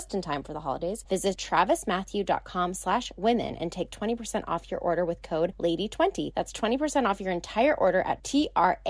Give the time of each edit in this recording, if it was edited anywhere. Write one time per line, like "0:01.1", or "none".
0:01.3
0:05.5
0:06.3